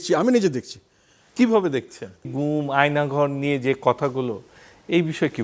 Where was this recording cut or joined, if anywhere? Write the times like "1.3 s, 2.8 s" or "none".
2.3 s